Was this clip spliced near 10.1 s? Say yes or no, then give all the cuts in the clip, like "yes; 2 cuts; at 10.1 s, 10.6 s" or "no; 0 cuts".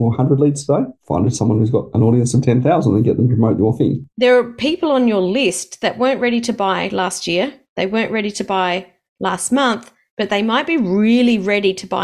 no; 2 cuts; at 1.0 s, 4.1 s